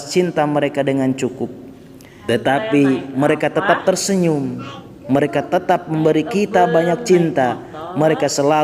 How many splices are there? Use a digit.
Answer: 1